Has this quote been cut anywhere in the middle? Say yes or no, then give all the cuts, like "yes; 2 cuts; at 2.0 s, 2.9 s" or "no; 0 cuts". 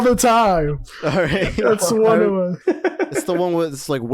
yes; 1 cut; at 2.6 s